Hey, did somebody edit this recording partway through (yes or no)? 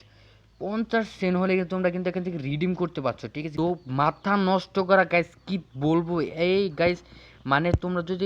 yes